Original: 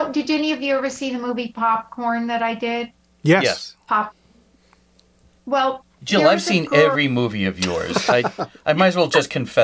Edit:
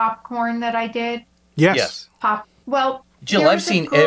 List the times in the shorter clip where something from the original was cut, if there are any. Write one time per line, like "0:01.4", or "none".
0:02.5